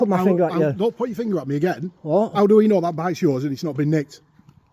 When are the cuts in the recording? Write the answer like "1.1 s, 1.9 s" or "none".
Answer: none